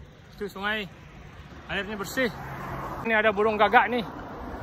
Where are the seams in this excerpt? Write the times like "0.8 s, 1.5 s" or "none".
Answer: 3.1 s